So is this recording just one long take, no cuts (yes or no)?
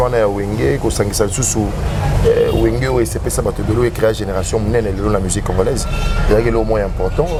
yes